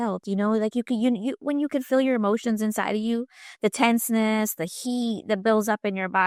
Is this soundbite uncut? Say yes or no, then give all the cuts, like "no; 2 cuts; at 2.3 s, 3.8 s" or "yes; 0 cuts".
yes; 0 cuts